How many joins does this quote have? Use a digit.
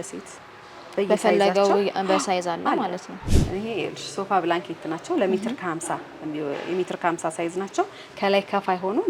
1